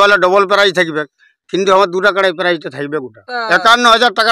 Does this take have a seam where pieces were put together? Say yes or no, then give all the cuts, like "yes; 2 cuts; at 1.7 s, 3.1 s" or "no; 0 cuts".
yes; 1 cut; at 3.3 s